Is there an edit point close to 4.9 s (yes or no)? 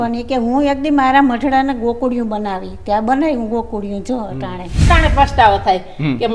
yes